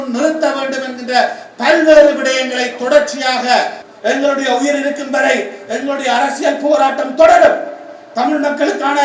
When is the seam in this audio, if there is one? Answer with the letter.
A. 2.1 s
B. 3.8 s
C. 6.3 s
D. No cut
B